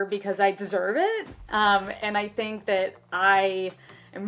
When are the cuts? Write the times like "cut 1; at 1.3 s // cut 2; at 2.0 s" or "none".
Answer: none